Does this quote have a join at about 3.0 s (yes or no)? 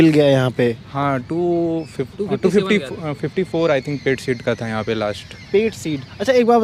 no